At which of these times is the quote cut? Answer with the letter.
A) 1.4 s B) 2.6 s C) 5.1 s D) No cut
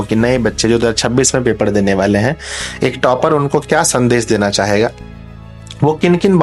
D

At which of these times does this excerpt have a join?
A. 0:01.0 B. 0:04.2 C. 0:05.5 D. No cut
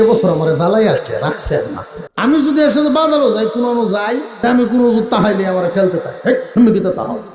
D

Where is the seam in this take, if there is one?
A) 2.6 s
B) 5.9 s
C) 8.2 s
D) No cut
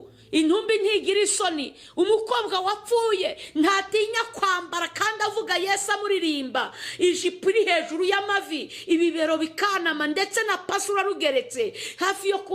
D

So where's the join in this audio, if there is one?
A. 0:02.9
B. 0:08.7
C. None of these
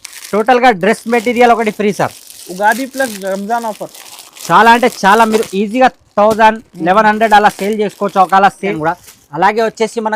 B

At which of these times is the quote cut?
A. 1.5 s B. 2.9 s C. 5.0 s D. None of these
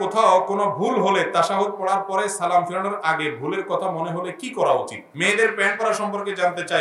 C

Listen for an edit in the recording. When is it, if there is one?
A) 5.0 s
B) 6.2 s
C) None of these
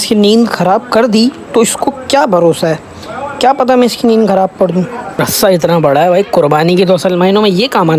A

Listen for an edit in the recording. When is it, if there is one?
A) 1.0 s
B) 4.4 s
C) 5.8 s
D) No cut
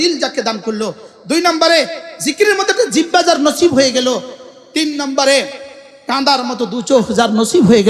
D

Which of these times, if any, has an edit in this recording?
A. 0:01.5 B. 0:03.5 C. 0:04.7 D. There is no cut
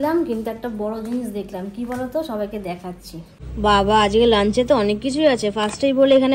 B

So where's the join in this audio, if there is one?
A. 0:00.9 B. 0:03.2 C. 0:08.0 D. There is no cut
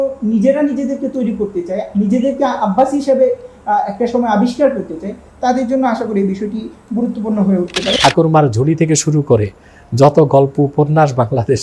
C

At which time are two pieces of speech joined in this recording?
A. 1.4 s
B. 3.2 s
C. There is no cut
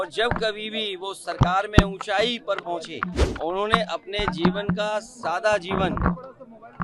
B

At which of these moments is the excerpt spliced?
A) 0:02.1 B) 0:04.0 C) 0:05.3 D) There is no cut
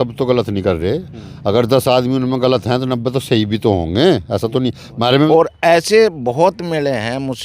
C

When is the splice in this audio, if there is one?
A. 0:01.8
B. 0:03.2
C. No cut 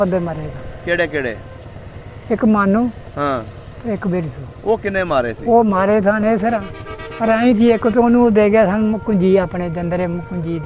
C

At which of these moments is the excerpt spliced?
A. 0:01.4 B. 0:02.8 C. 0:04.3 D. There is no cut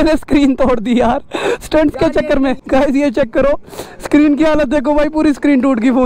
D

